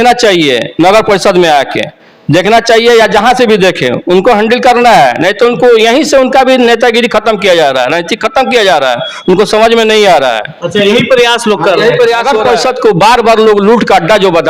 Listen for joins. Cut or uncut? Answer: cut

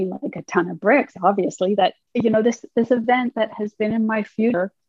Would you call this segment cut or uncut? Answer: cut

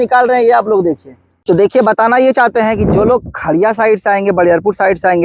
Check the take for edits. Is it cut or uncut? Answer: cut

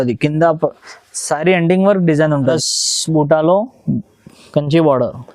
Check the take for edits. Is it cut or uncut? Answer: cut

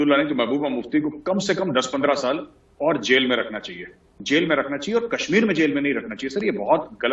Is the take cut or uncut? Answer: cut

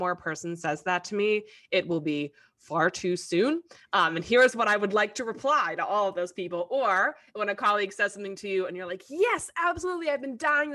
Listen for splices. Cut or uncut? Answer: uncut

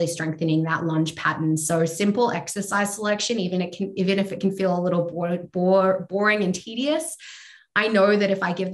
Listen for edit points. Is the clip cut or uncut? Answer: uncut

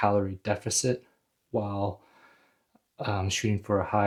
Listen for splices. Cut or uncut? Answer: uncut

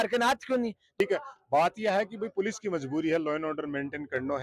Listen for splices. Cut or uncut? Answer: cut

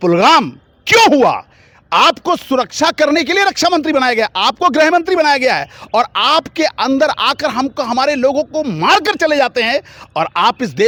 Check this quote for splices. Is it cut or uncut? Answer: uncut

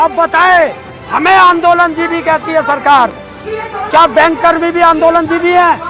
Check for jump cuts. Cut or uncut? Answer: uncut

